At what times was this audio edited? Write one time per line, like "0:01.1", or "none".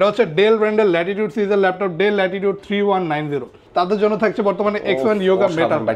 0:03.5